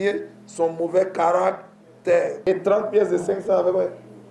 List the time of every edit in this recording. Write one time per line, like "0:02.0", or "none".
0:02.4